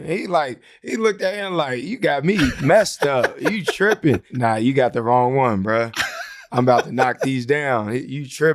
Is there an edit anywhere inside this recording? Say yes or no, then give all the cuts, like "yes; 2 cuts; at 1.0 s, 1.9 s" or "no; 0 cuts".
yes; 1 cut; at 4.3 s